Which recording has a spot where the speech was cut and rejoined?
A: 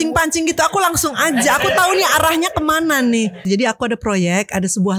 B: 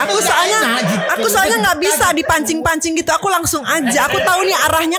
A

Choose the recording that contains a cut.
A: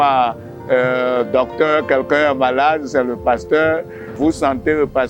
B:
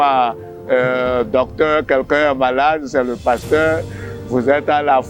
A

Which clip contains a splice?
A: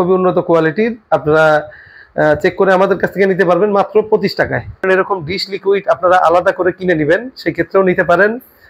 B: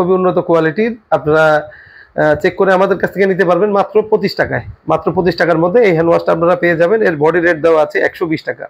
A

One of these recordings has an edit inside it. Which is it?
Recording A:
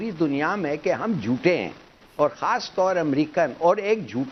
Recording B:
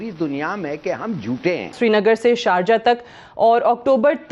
B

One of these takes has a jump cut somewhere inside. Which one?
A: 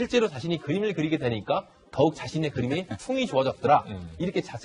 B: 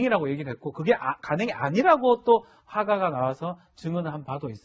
B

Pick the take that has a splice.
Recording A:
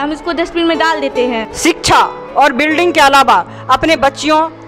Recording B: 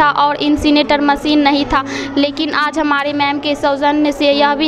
A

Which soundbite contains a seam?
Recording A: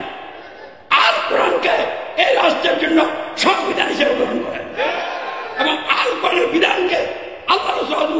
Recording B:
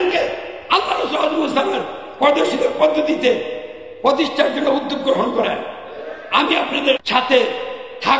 B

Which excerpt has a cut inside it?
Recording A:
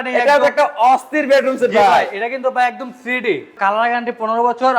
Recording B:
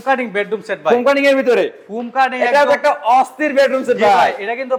A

